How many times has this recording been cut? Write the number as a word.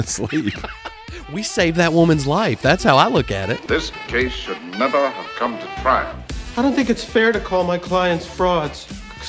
one